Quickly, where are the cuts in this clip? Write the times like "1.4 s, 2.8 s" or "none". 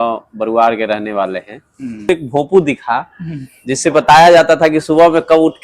2.1 s